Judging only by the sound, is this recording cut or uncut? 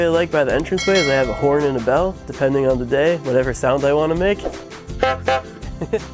uncut